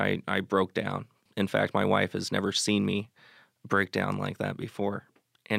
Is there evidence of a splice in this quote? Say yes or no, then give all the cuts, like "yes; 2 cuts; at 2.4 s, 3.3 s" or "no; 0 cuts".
yes; 1 cut; at 1.3 s